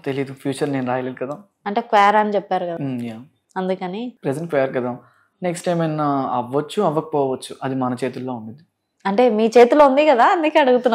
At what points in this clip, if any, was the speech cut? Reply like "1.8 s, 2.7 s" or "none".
none

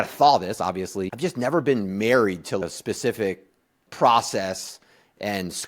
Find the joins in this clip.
1.0 s, 2.6 s, 3.8 s

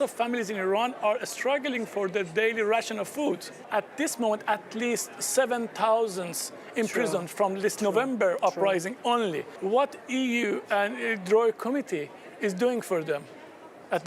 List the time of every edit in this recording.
3.7 s, 9.5 s

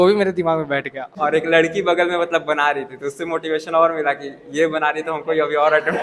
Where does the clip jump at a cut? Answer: 1.0 s

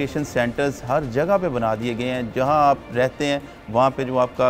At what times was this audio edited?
none

